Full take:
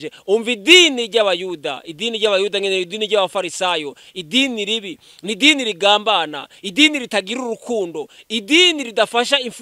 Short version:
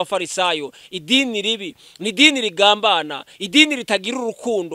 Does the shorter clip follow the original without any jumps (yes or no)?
yes